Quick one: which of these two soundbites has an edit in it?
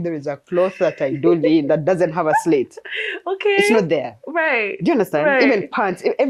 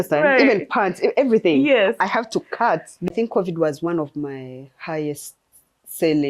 second; 1 cut; at 3.1 s

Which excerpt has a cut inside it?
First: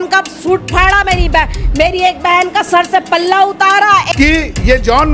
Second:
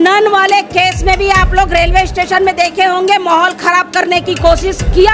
first; 1 cut; at 4.1 s

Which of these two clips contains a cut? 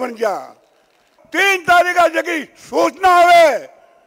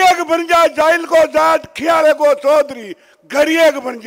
first; 1 cut; at 1.2 s

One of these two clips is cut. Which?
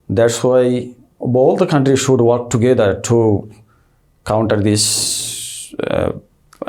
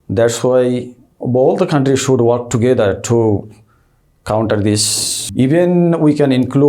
second; 1 cut; at 5.2 s

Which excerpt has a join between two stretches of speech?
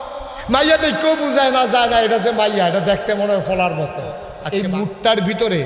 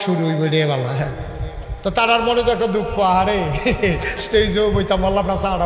first; 1 cut; at 4.3 s

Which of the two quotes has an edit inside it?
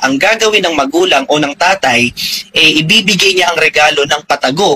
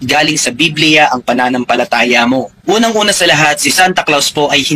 second; 1 cut; at 2.5 s

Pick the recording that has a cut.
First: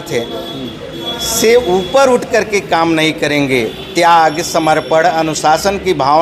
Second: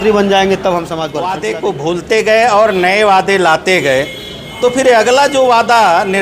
second; 1 cut; at 1.1 s

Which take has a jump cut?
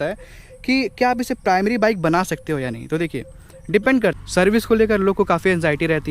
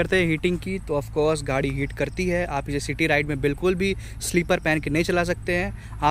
first; 1 cut; at 4.2 s

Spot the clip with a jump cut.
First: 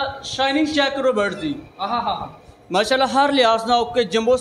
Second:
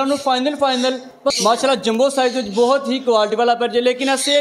second; 1 cut; at 1.3 s

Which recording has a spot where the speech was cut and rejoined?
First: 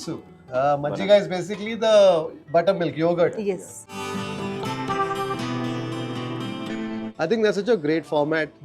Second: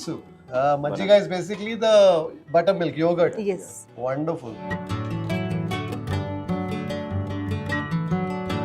first; 1 cut; at 3.9 s

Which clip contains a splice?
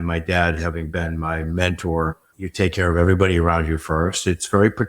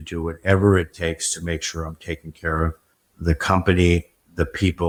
first; 1 cut; at 2.2 s

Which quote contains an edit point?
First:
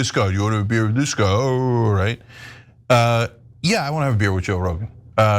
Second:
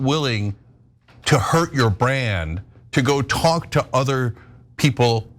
first; 1 cut; at 0.9 s

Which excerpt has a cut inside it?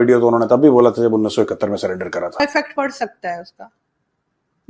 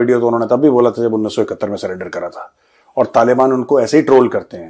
first; 1 cut; at 2.4 s

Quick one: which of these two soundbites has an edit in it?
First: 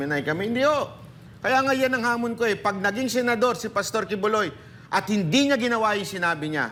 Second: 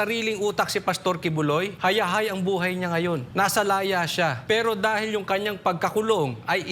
second; 3 cuts; at 1.7 s, 3.3 s, 4.4 s

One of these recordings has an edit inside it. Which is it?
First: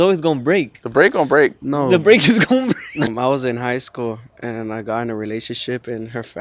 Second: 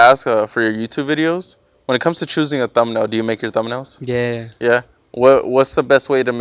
first; 1 cut; at 3.1 s

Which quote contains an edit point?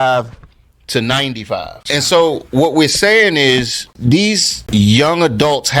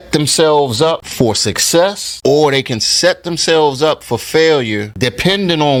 first; 1 cut; at 1.8 s

